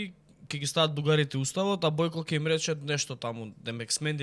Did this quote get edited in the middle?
no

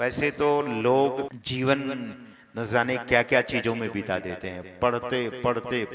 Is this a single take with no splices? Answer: no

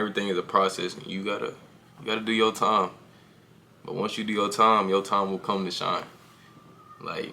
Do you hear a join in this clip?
no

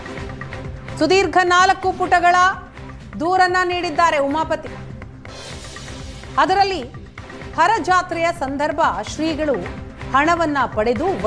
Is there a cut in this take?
yes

